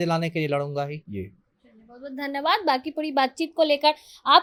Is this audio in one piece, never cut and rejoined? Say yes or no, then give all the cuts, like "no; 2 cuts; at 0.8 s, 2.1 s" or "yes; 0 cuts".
yes; 0 cuts